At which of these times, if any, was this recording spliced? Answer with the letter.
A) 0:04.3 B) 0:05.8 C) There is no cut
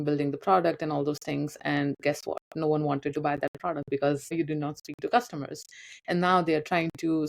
A